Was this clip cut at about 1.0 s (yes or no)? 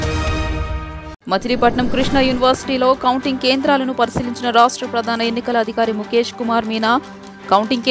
yes